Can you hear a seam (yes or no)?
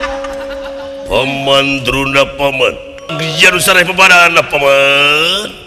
yes